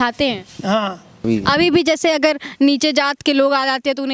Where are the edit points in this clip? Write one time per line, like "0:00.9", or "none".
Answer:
0:01.3